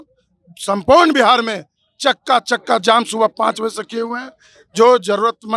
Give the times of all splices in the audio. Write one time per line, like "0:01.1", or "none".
none